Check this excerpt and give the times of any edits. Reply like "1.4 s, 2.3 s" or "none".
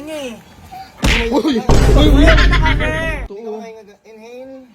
3.3 s